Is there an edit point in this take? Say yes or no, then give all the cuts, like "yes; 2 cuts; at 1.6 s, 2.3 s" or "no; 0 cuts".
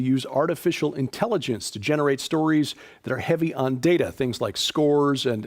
no; 0 cuts